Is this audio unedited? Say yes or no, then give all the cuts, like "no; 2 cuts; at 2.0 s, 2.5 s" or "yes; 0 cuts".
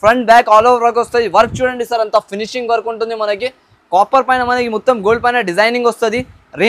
yes; 0 cuts